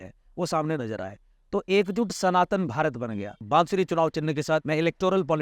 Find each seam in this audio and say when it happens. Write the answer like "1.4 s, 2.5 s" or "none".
3.4 s, 4.6 s